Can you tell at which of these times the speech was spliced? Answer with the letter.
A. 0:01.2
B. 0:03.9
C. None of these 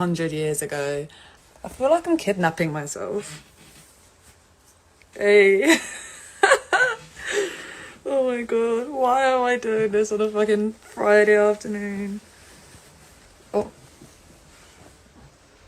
A